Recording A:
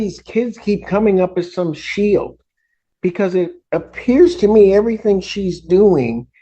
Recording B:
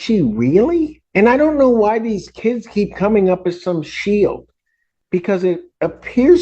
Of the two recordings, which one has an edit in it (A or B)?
B